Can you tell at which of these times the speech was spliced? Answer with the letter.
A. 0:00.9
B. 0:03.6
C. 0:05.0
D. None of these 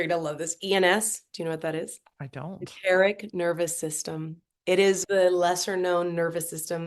C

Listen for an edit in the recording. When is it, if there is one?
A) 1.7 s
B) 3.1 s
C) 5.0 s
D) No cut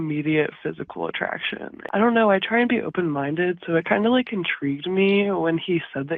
A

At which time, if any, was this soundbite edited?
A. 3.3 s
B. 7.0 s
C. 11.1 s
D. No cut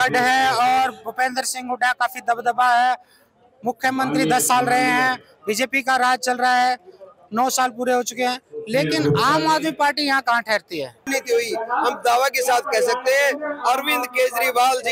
C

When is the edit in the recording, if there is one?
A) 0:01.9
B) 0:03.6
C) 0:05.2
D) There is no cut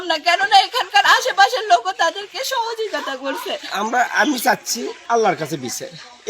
B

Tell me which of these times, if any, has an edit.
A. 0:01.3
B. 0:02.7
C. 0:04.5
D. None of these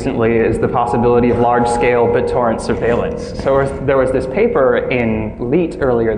B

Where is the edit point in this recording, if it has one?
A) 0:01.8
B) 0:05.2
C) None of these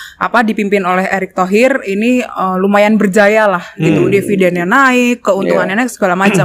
C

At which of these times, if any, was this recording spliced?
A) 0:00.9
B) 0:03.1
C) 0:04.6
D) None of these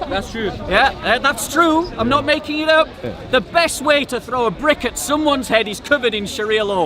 B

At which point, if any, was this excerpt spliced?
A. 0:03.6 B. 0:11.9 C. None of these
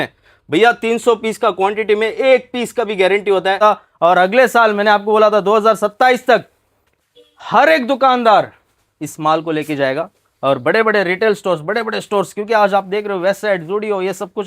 A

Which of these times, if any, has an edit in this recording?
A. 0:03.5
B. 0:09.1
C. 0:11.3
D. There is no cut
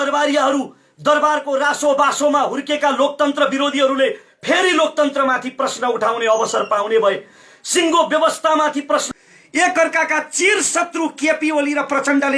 B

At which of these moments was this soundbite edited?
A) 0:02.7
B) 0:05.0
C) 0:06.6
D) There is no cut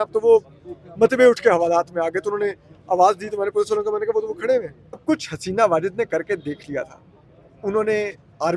B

